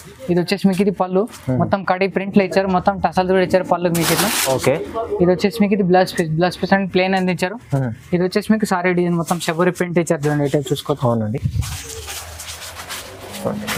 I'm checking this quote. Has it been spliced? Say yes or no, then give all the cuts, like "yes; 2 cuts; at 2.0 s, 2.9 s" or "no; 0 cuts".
no; 0 cuts